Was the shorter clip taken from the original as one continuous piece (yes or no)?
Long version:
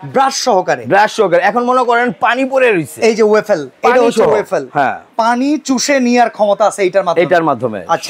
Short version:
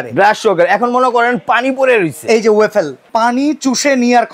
no